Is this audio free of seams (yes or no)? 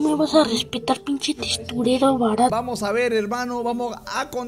no